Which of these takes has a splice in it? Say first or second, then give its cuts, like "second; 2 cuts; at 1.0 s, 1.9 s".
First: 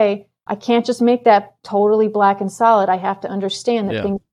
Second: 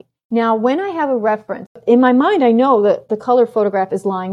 second; 1 cut; at 1.8 s